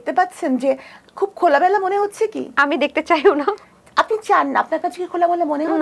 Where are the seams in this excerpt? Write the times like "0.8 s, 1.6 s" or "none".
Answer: none